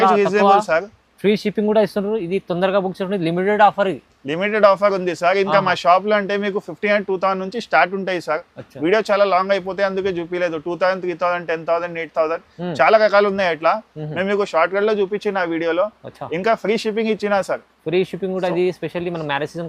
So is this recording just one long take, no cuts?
yes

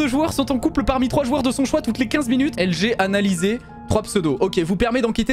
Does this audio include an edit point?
yes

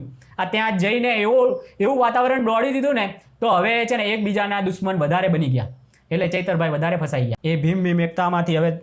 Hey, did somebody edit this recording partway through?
yes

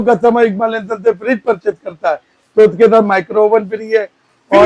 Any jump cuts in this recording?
no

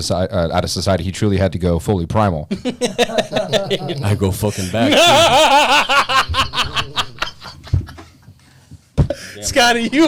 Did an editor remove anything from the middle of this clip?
no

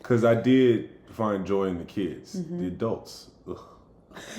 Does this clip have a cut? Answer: no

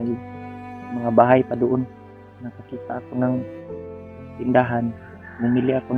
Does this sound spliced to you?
no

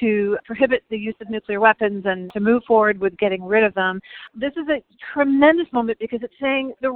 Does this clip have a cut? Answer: yes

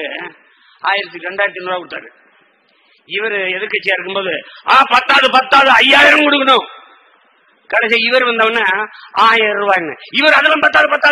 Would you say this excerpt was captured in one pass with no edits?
yes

